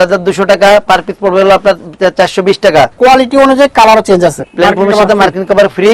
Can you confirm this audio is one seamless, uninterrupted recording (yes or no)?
no